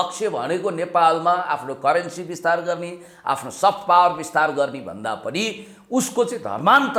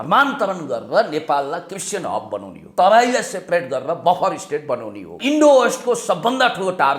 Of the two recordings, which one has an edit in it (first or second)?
second